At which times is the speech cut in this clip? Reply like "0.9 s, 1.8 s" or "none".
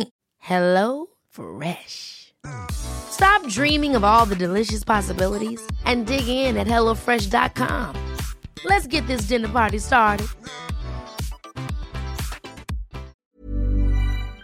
13.2 s

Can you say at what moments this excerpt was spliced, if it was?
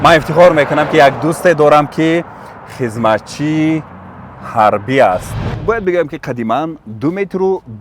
5.5 s

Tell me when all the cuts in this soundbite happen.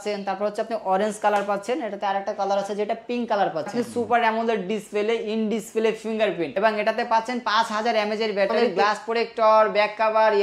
3.7 s, 8.6 s

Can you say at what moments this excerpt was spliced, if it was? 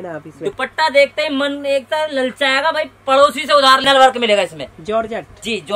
3.8 s

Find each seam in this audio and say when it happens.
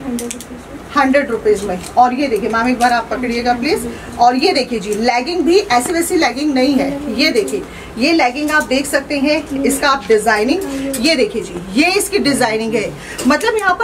none

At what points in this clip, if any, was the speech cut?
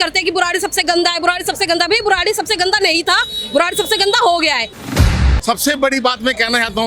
5.1 s

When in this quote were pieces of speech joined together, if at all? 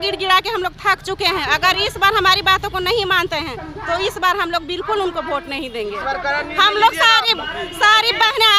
none

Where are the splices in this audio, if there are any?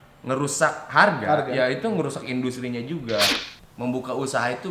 3.3 s

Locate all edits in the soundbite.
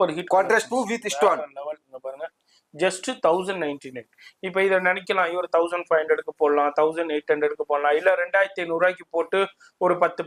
none

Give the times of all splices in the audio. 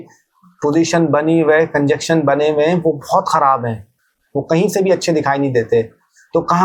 none

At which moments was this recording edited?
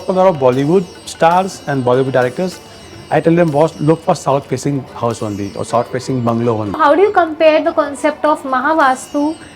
2.9 s, 6.8 s

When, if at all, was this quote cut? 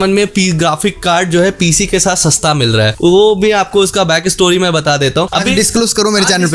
none

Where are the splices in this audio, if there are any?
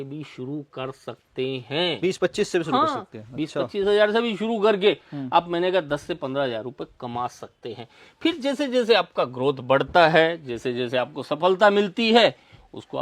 none

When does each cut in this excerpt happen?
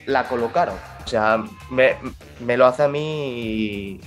1.1 s

